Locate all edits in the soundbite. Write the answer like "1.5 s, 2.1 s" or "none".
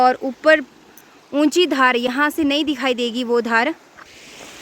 none